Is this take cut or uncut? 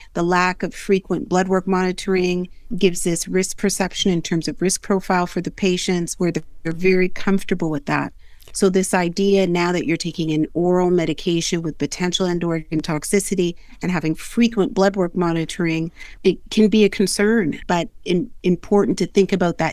uncut